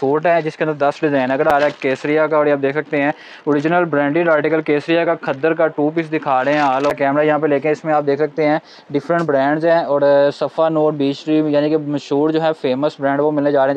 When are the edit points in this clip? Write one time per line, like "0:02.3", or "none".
0:01.5
0:06.9